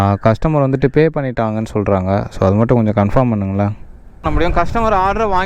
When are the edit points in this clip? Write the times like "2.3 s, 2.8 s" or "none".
4.2 s